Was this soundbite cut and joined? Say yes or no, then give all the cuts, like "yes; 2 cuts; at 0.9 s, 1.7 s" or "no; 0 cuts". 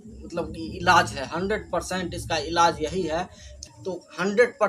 yes; 1 cut; at 3.5 s